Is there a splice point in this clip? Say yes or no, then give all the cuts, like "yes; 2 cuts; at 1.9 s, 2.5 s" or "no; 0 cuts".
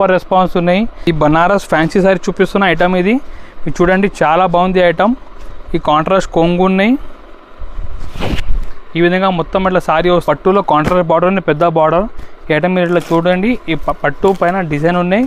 yes; 2 cuts; at 1.1 s, 10.2 s